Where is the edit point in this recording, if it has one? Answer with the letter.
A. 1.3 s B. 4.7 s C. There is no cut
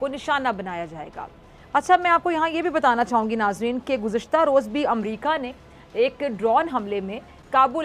C